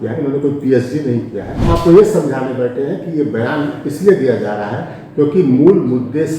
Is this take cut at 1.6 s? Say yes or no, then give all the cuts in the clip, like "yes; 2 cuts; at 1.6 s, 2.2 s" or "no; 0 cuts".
yes; 1 cut; at 1.6 s